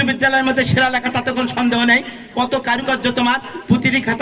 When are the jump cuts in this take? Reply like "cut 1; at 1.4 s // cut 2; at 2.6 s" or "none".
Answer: none